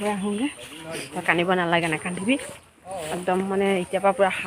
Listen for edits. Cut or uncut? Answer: uncut